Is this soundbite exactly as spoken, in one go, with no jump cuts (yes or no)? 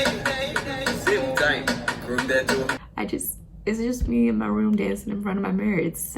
no